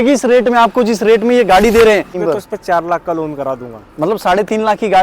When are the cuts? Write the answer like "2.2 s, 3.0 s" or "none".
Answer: 2.2 s